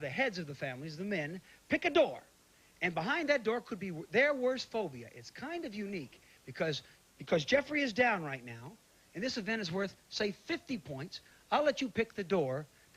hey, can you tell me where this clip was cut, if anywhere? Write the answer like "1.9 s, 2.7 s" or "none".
3.3 s